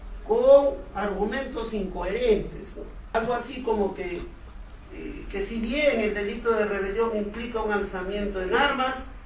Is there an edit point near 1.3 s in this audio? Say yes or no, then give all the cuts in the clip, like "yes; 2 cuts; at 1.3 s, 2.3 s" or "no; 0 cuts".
no; 1 cut; at 3.1 s